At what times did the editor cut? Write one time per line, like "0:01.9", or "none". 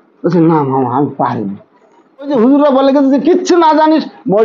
0:02.3